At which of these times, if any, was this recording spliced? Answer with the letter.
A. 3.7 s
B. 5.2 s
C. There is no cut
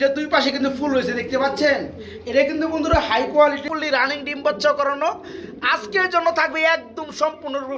A